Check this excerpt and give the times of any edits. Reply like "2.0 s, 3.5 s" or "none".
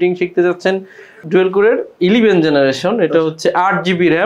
1.2 s